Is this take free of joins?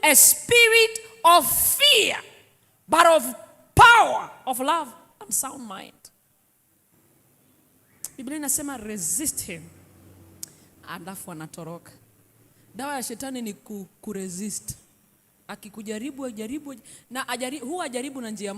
no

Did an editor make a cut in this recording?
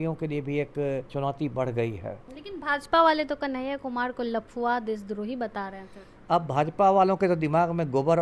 yes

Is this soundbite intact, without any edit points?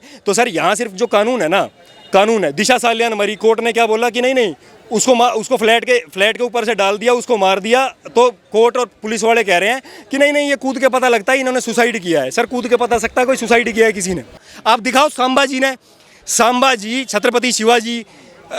no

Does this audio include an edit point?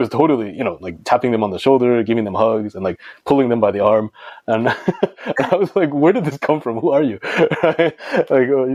no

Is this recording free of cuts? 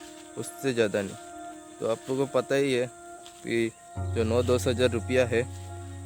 yes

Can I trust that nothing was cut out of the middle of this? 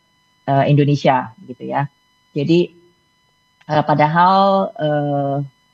yes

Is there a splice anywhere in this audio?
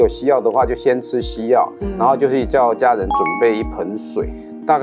no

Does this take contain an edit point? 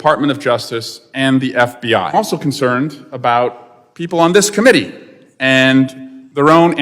yes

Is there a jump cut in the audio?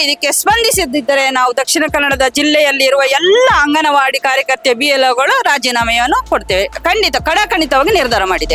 no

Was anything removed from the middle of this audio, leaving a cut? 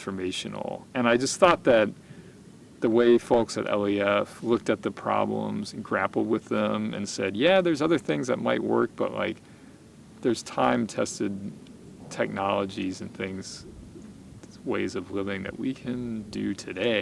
no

